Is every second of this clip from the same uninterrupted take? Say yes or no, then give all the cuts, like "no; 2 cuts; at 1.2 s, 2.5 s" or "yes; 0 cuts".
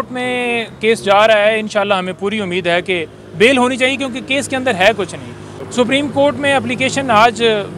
no; 1 cut; at 5.5 s